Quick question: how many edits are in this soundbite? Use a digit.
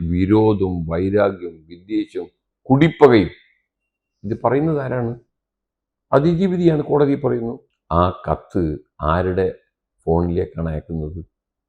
1